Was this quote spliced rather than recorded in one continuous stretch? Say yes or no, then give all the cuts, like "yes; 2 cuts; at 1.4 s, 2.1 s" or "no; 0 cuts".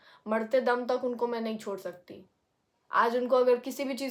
no; 0 cuts